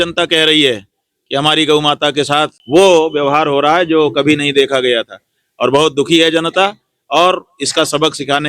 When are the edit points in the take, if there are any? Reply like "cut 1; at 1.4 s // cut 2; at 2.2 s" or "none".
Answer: cut 1; at 2.6 s